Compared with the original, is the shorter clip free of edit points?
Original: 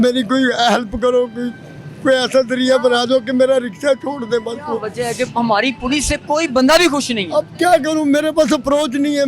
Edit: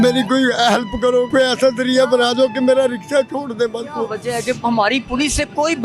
no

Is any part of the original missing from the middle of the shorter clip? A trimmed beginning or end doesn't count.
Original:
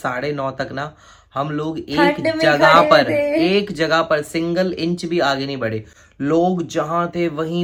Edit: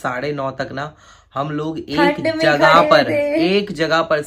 no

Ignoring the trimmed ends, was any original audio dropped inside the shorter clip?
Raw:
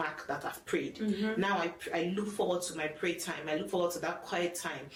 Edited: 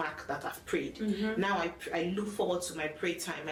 no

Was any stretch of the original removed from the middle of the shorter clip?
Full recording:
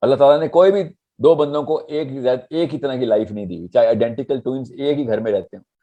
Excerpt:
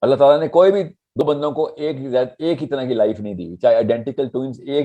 yes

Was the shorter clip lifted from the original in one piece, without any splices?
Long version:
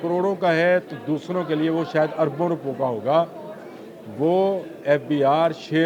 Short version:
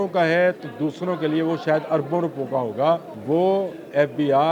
no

